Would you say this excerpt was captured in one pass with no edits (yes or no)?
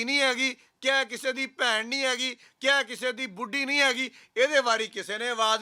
yes